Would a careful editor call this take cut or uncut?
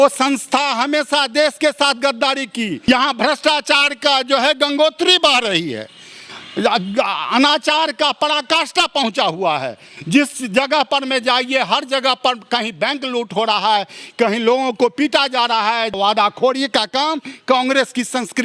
cut